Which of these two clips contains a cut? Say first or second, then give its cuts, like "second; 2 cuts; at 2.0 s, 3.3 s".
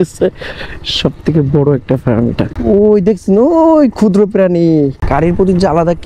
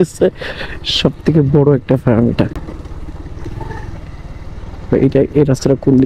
first; 2 cuts; at 2.5 s, 5.0 s